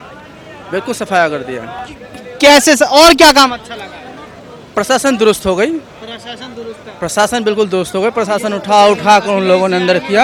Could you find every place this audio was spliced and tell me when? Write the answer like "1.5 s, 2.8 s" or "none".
none